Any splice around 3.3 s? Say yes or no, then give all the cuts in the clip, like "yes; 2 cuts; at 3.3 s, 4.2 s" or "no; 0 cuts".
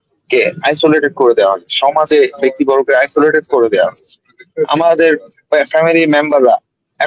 no; 0 cuts